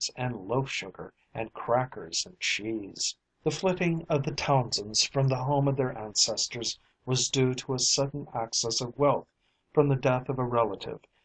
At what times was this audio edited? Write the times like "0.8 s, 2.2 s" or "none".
5.0 s

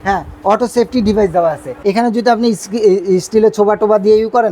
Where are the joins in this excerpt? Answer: 1.7 s

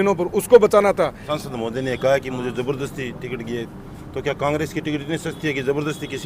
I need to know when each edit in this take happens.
1.3 s

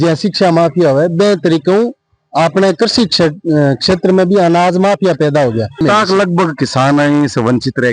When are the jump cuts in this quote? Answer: 5.8 s

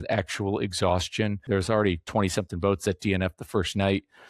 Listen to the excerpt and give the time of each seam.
1.4 s

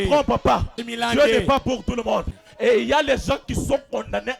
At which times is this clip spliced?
2.3 s

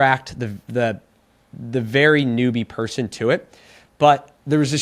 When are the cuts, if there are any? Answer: none

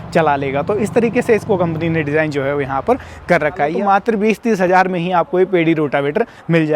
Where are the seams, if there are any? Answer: 3.7 s

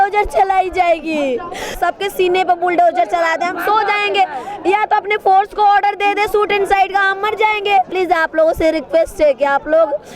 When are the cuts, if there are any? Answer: 1.8 s, 7.9 s

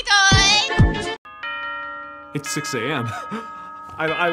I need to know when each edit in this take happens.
1.2 s

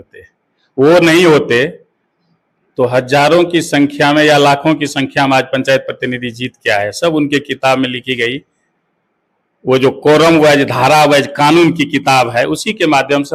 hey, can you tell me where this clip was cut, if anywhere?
none

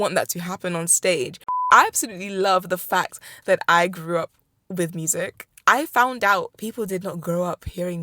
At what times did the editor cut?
1.6 s, 6.5 s

